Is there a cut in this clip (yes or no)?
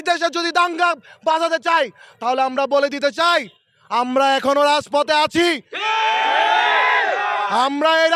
no